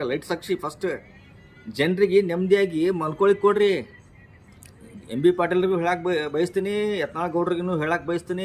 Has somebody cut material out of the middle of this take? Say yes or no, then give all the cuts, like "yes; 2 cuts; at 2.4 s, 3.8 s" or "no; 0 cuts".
no; 0 cuts